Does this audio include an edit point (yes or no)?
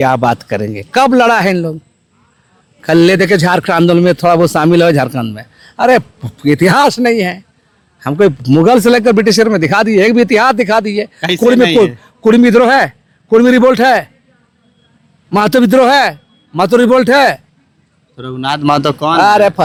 no